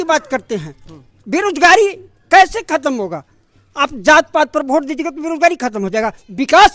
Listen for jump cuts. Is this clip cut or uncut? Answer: uncut